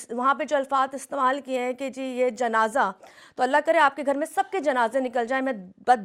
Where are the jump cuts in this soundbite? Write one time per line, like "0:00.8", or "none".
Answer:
none